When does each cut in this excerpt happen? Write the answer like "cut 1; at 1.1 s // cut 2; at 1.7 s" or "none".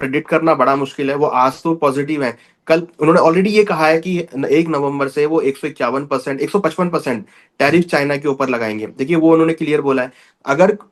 none